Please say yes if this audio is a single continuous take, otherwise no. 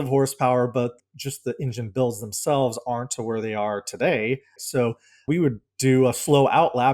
no